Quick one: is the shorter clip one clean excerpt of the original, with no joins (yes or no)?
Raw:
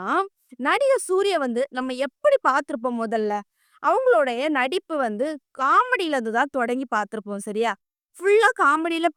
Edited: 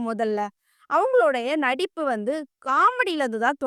yes